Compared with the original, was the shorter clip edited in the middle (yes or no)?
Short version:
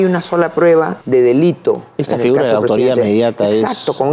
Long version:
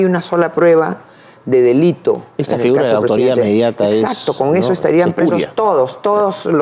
yes